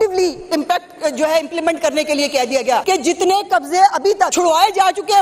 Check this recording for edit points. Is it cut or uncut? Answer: cut